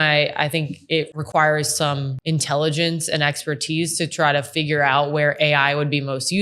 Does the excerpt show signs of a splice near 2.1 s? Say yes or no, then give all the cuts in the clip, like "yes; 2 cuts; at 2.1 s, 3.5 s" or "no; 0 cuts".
yes; 2 cuts; at 1.1 s, 2.1 s